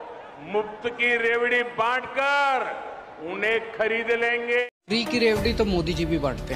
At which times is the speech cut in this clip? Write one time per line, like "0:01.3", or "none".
0:04.7